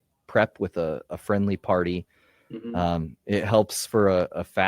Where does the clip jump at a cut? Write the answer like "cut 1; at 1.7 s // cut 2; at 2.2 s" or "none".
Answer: none